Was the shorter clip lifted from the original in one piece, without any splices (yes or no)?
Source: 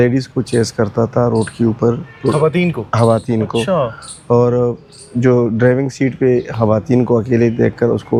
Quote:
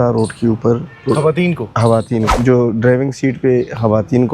no